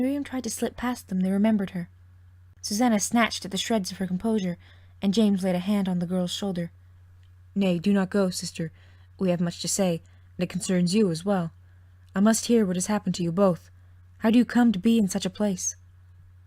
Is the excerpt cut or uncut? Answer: cut